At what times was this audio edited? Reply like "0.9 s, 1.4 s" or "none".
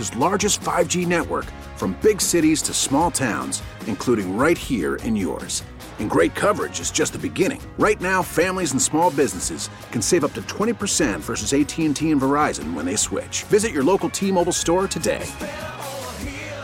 none